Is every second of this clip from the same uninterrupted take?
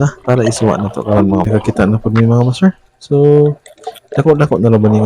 no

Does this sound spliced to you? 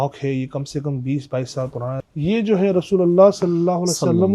yes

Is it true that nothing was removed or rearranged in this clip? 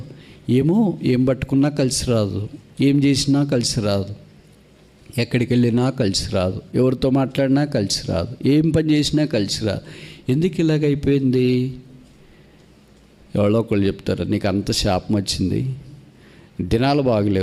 yes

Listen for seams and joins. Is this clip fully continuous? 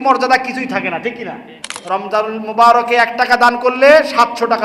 no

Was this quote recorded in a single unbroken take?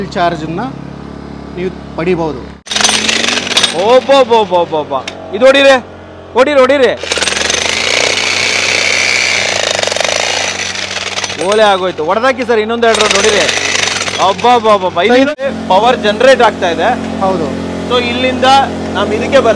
no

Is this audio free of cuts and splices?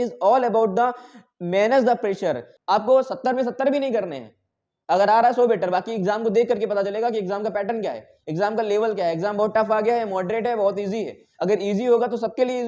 no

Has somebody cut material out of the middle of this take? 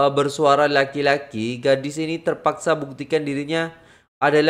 no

